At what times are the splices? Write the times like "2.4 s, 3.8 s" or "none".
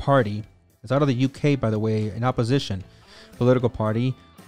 none